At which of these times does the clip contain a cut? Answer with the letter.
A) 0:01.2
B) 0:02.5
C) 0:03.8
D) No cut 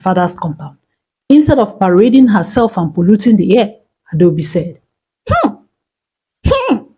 D